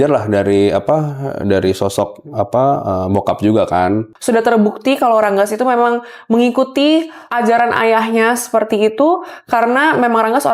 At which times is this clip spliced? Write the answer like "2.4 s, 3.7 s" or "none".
4.1 s, 7.2 s